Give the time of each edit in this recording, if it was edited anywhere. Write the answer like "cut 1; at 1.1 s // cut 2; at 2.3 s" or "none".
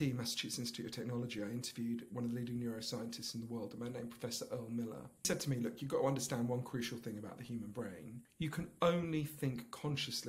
cut 1; at 5.3 s // cut 2; at 8.2 s